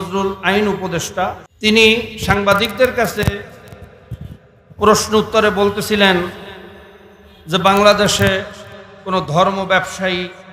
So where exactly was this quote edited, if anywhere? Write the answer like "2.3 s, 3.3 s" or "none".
1.5 s